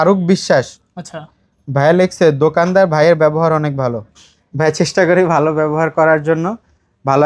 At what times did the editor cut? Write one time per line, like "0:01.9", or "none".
none